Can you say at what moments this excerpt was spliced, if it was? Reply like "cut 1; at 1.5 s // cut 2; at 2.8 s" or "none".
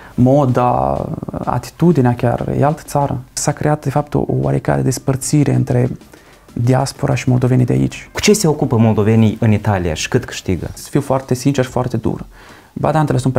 cut 1; at 3.4 s // cut 2; at 8.1 s // cut 3; at 10.8 s